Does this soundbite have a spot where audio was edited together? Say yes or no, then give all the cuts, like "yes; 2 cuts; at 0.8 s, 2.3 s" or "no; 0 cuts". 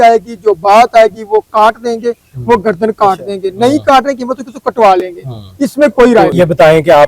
no; 0 cuts